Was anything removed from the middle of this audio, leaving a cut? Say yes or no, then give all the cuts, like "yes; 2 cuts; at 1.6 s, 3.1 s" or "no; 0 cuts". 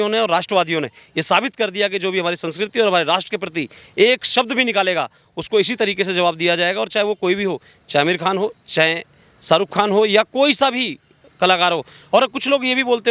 no; 0 cuts